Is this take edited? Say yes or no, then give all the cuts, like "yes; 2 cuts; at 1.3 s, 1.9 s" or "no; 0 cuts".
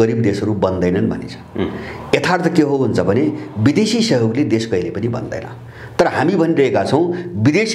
no; 0 cuts